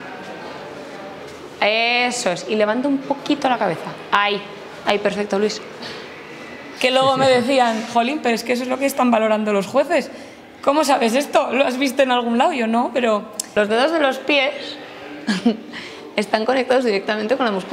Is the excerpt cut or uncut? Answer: cut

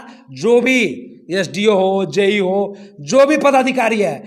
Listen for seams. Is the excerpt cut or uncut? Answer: uncut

